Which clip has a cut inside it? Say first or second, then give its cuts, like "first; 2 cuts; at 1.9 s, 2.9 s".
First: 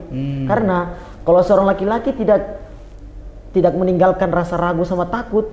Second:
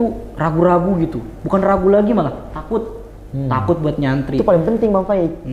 second; 1 cut; at 4.4 s